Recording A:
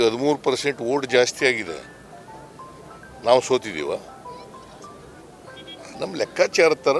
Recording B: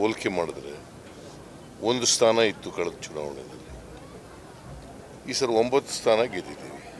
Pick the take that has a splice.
B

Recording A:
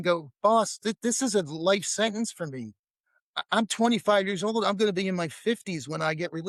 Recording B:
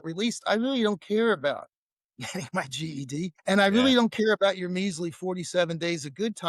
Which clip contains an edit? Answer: B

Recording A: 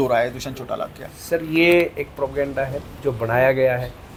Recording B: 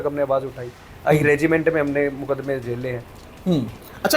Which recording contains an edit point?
B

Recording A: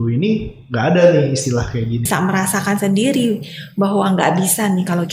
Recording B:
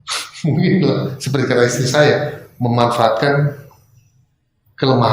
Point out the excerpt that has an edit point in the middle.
A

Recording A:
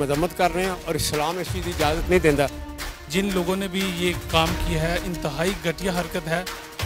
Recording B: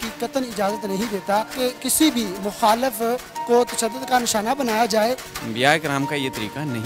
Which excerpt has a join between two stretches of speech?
B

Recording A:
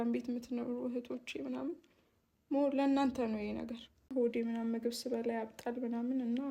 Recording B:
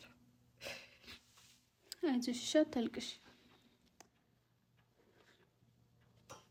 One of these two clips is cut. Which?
A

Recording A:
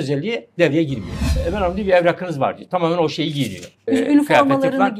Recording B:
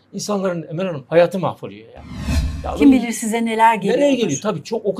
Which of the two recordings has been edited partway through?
A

